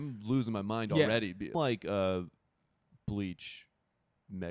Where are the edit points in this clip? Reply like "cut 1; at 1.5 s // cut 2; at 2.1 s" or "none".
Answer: cut 1; at 1.5 s